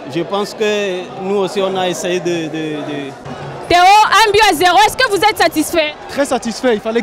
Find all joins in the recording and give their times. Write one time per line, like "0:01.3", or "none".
0:03.2